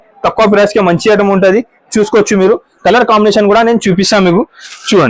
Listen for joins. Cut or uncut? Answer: uncut